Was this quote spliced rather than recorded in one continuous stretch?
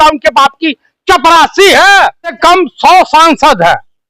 yes; 1 cut; at 2.4 s

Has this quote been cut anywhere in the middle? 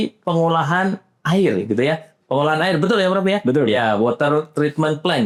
no; 0 cuts

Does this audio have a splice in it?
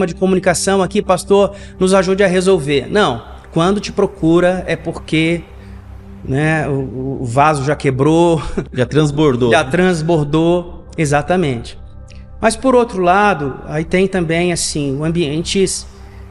no; 0 cuts

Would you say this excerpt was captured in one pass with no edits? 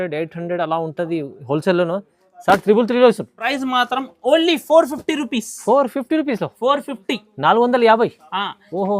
no; 1 cut; at 3.5 s

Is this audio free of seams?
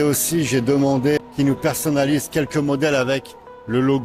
no; 1 cut; at 1.2 s

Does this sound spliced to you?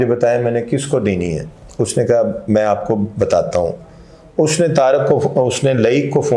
no; 0 cuts

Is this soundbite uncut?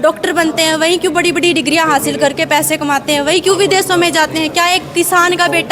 yes; 0 cuts

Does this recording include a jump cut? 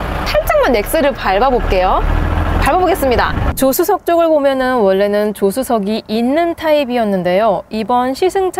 yes; 1 cut; at 3.4 s

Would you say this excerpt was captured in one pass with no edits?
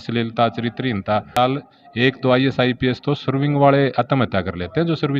no; 1 cut; at 1.4 s

